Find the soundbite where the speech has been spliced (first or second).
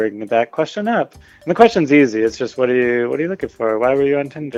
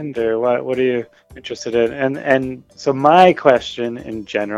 second